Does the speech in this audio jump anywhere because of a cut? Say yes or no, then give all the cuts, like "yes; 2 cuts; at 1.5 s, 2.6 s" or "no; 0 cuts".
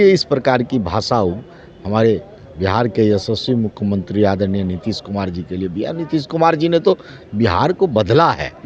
no; 0 cuts